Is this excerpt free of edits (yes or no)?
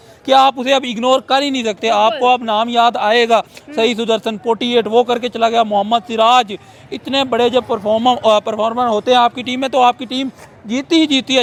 yes